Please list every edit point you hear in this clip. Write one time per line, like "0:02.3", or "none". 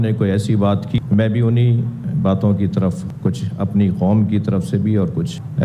0:01.0